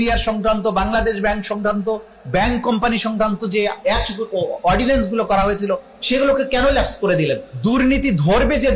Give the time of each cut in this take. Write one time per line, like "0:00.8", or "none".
0:07.5